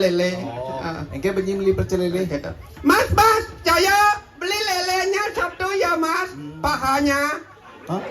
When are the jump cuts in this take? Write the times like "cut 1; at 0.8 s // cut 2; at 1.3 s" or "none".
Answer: none